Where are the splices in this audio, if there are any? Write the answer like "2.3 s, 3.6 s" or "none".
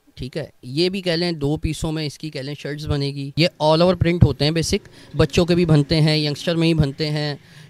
3.2 s